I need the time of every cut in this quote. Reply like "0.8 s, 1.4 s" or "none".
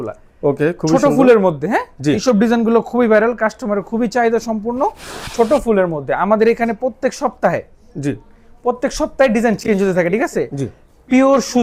none